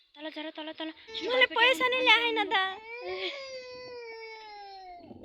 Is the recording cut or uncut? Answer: cut